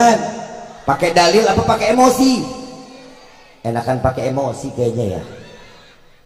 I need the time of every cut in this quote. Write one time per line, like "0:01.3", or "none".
none